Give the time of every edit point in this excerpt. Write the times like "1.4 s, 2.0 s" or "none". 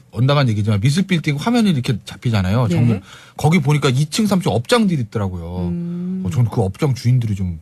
2.8 s